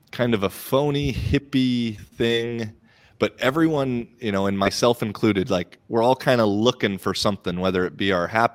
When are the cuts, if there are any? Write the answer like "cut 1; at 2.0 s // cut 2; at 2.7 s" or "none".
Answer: none